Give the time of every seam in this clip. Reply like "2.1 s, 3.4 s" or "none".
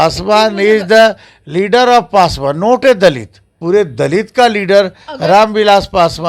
3.6 s